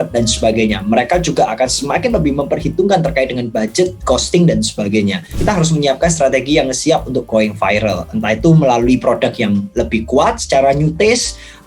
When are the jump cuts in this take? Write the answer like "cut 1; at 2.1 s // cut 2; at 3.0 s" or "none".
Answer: cut 1; at 5.3 s